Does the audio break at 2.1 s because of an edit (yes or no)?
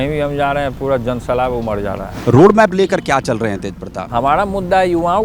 yes